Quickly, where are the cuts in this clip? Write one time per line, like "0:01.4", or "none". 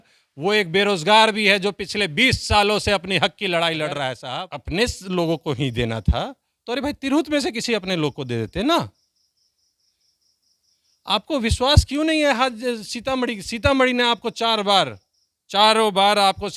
0:04.2